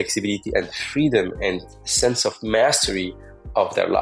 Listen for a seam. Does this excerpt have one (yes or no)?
no